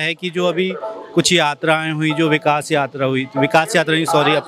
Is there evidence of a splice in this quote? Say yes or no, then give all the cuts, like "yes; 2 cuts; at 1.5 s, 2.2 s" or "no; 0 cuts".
no; 0 cuts